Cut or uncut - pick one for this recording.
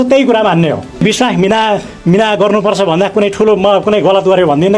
cut